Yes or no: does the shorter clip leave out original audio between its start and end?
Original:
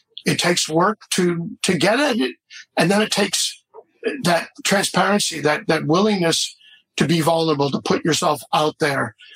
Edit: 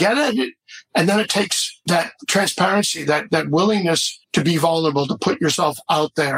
yes